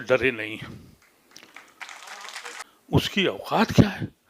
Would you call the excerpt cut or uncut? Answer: cut